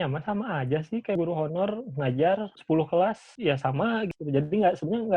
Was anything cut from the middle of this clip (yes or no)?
yes